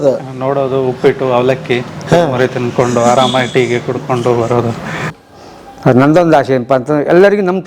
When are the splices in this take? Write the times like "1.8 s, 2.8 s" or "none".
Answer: 5.1 s